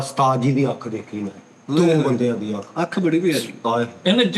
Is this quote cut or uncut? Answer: uncut